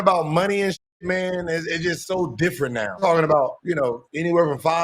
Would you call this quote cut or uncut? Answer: cut